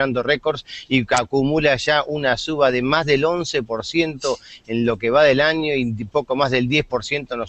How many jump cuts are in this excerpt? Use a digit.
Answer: 0